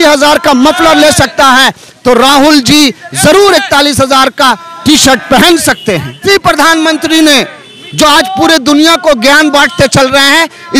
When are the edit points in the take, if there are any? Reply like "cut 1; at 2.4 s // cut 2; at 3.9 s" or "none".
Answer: cut 1; at 6.2 s

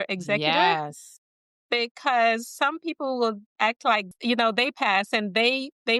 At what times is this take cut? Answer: cut 1; at 3.5 s

